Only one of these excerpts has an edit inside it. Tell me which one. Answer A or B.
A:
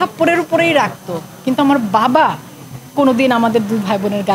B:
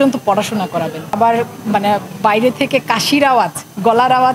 B